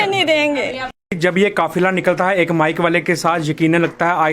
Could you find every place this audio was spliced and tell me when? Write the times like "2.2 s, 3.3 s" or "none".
1.2 s